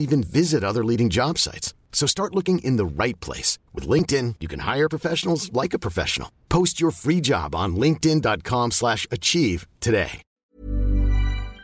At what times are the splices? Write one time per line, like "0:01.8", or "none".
0:10.2